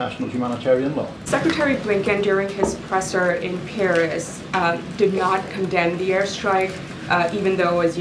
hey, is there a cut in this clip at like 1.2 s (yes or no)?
yes